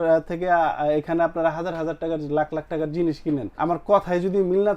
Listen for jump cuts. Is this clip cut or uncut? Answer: cut